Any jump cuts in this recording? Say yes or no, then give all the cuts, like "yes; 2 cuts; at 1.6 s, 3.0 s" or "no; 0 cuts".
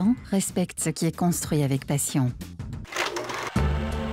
yes; 1 cut; at 2.9 s